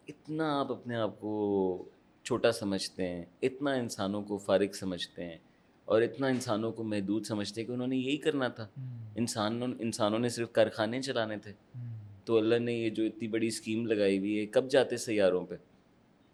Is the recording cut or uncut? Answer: uncut